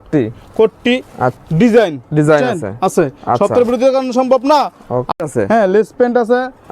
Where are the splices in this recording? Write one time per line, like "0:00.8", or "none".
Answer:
0:01.4
0:05.1